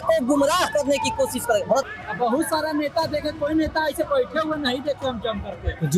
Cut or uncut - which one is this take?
cut